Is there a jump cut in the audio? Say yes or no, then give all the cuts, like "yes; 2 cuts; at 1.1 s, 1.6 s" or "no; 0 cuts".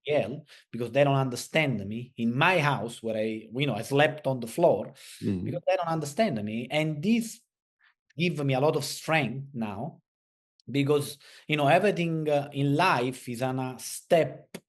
no; 0 cuts